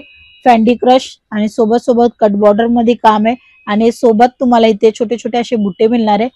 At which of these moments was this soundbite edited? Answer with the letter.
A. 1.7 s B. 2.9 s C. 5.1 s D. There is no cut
D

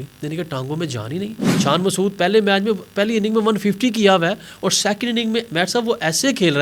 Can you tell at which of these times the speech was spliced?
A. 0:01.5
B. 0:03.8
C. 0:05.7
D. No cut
A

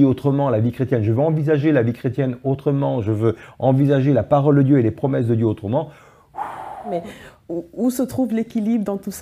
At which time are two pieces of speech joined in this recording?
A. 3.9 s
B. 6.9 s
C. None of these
B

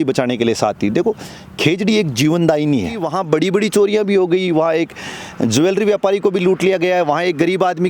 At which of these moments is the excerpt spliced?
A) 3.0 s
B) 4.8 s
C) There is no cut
A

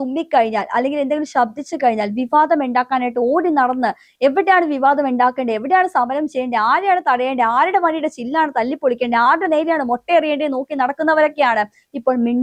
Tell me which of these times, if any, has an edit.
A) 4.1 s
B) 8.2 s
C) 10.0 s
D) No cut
D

